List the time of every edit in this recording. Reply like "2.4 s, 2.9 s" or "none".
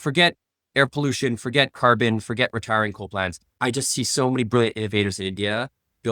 3.4 s